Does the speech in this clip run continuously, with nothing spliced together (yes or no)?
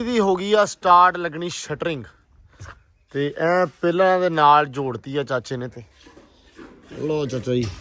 yes